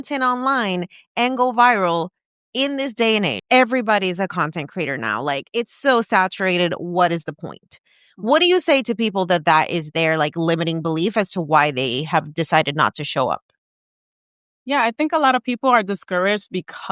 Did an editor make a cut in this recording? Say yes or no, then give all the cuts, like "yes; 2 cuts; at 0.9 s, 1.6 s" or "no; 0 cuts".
yes; 1 cut; at 3.4 s